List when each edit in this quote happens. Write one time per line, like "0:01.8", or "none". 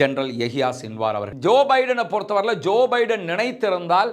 0:01.3